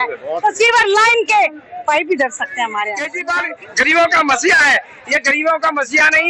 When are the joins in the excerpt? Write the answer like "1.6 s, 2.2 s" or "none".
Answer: 3.2 s